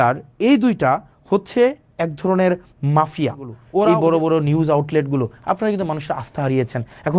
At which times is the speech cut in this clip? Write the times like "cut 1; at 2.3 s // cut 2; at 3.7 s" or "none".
cut 1; at 3.8 s